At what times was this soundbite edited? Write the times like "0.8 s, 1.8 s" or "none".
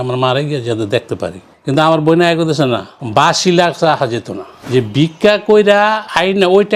1.5 s, 4.6 s